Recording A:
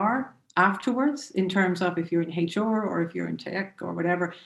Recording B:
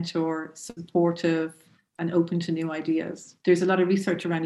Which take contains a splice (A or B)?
B